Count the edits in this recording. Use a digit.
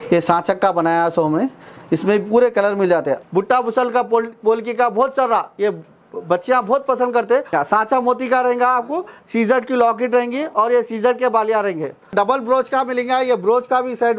3